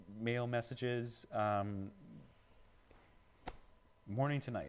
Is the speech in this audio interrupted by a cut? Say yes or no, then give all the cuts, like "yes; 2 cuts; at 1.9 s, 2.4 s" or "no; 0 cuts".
no; 0 cuts